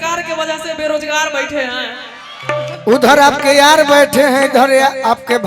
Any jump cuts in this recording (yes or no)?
no